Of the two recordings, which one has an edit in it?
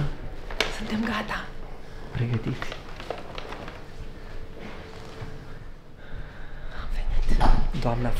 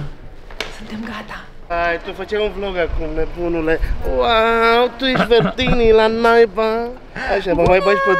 second; 2 cuts; at 1.5 s, 7.0 s

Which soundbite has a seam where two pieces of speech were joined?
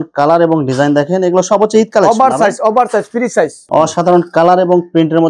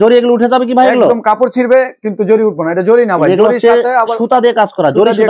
first; 1 cut; at 3.6 s

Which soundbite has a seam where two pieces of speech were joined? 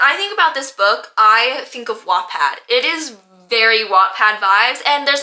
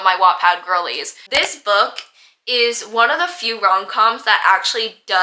second; 1 cut; at 1.2 s

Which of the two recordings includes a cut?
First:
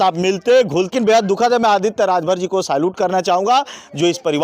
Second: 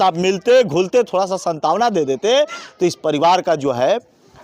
first; 1 cut; at 0.9 s

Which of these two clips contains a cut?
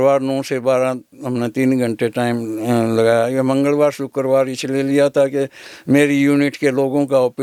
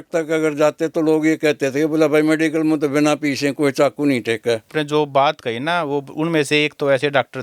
second; 1 cut; at 4.7 s

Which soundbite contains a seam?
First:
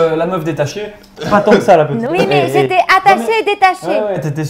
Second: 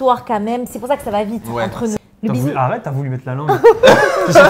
second; 1 cut; at 2.0 s

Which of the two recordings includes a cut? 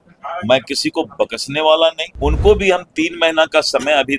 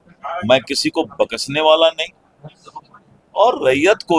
first; 1 cut; at 2.1 s

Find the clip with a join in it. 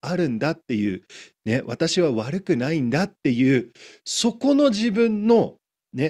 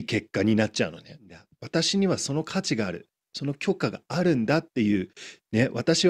second; 1 cut; at 1.5 s

